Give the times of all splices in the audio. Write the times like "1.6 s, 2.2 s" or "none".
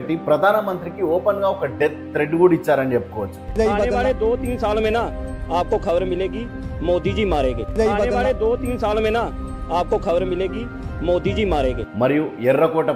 none